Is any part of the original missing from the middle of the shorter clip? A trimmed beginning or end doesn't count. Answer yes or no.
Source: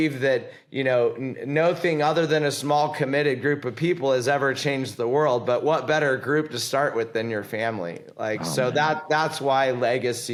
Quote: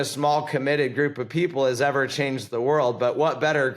no